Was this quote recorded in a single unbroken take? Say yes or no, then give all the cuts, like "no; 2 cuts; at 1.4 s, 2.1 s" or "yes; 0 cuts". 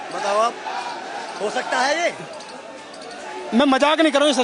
yes; 0 cuts